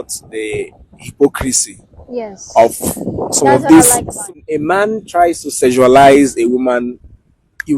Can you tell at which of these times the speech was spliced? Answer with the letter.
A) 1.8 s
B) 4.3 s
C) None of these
B